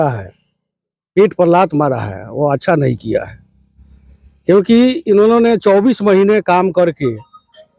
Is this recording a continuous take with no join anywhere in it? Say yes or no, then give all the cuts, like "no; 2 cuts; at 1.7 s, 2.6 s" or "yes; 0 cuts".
yes; 0 cuts